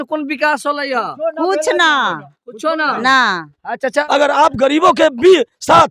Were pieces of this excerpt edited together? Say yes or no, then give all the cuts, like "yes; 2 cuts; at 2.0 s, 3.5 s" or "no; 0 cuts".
yes; 1 cut; at 4.0 s